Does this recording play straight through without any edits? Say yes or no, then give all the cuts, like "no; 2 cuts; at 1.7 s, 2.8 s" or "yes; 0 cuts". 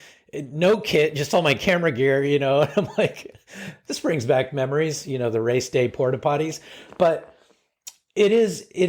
yes; 0 cuts